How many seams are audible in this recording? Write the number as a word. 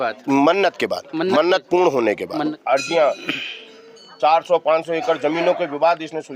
one